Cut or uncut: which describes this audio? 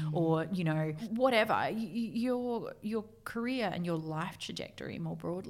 cut